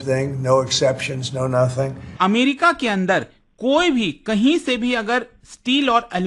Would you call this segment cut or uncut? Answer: cut